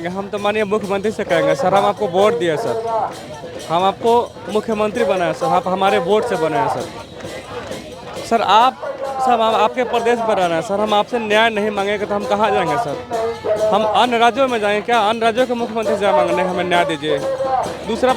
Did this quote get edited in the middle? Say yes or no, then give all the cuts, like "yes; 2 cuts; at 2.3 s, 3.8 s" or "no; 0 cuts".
no; 0 cuts